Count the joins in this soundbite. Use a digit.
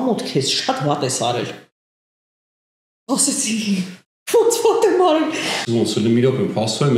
1